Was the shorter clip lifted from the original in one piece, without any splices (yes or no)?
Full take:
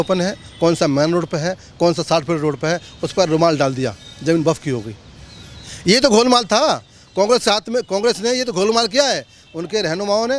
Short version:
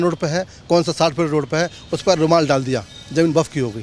yes